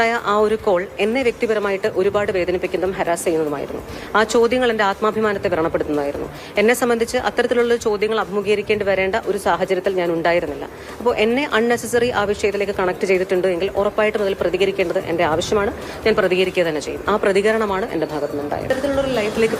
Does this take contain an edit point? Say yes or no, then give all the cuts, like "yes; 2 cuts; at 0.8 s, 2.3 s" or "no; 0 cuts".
yes; 1 cut; at 18.6 s